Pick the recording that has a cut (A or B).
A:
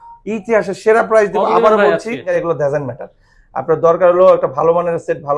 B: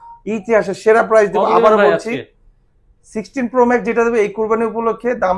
A